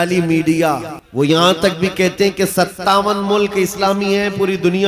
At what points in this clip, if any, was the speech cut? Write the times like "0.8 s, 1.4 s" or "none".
1.0 s